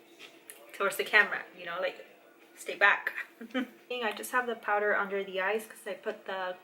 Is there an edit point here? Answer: yes; 1 cut; at 3.8 s

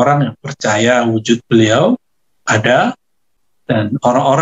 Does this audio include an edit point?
no; 0 cuts

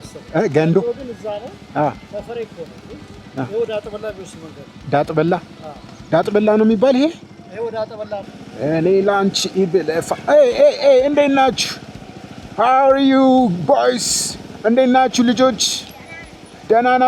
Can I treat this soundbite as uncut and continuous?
no; 1 cut; at 8.3 s

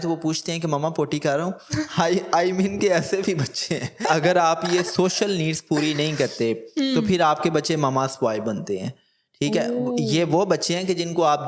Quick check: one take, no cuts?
no; 1 cut; at 4.0 s

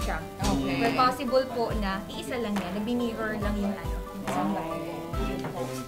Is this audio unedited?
yes; 0 cuts

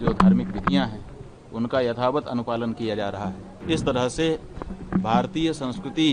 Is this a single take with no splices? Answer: no; 1 cut; at 3.5 s

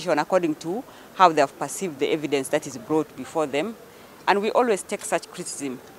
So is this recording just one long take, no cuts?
no; 1 cut; at 3.8 s

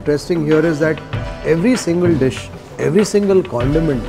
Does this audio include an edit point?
no; 0 cuts

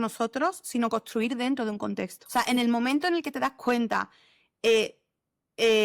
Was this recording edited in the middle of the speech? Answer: yes; 1 cut; at 2.2 s

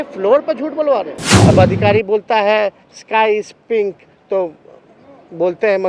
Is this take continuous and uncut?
no; 1 cut; at 1.2 s

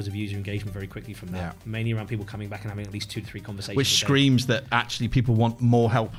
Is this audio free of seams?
yes; 0 cuts

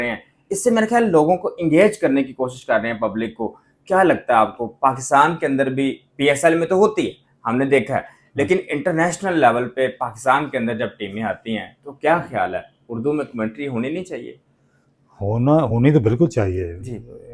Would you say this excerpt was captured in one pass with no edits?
yes; 0 cuts

